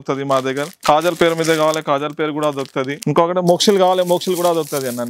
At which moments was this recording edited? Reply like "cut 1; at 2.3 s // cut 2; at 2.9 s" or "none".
none